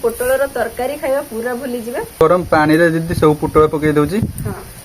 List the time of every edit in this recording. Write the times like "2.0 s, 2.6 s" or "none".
2.2 s